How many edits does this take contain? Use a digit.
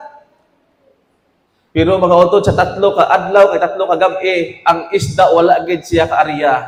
0